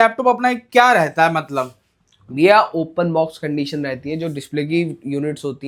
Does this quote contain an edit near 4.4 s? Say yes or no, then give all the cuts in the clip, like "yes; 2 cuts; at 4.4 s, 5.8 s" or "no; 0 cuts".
no; 0 cuts